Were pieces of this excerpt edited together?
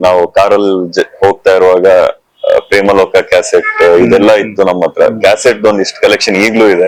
no; 0 cuts

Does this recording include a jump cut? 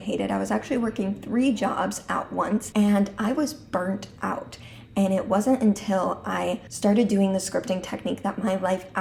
no; 0 cuts

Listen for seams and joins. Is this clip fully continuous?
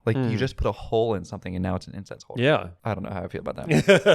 no; 1 cut; at 2.7 s

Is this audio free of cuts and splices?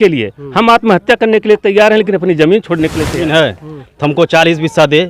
no; 1 cut; at 3.3 s

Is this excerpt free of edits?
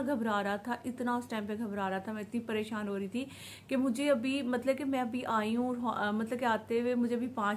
yes; 0 cuts

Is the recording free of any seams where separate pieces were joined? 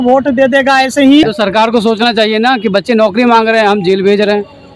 no; 1 cut; at 1.2 s

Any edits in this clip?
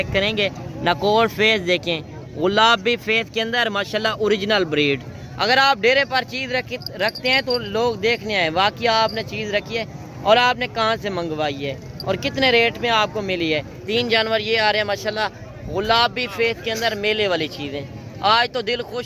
yes; 1 cut; at 13.7 s

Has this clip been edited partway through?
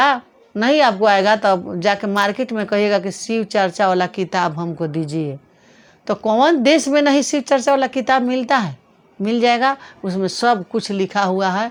no; 0 cuts

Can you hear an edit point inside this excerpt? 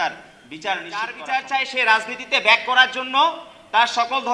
yes; 1 cut; at 1.2 s

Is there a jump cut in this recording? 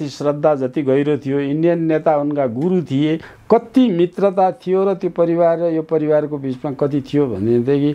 yes; 1 cut; at 3.3 s

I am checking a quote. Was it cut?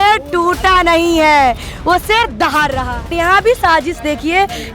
yes; 1 cut; at 3.1 s

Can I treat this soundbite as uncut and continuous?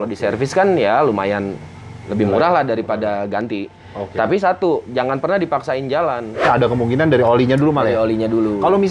no; 1 cut; at 6.4 s

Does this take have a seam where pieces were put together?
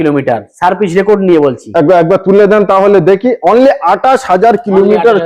no; 0 cuts

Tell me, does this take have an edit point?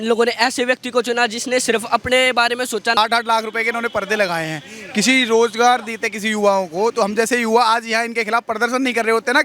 yes; 1 cut; at 3.0 s

